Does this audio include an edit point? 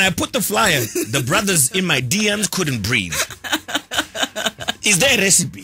no; 0 cuts

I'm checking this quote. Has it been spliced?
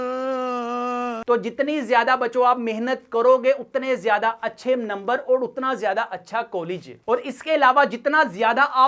no; 0 cuts

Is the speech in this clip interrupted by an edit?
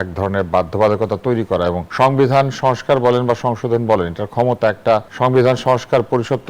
yes; 2 cuts; at 1.8 s, 5.1 s

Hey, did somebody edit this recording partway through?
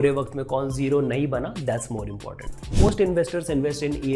yes; 1 cut; at 2.9 s

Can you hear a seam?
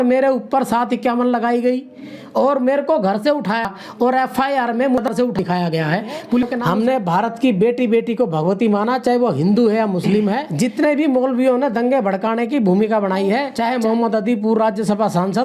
yes; 3 cuts; at 6.5 s, 10.5 s, 13.5 s

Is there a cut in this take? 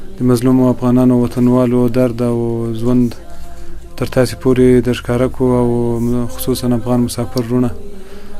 no; 0 cuts

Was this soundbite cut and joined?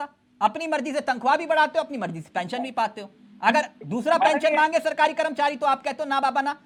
no; 0 cuts

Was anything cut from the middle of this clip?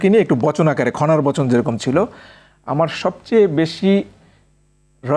no; 0 cuts

